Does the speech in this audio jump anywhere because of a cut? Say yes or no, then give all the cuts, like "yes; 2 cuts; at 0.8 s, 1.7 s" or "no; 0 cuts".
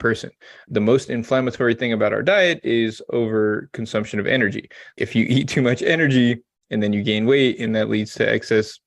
yes; 1 cut; at 4.9 s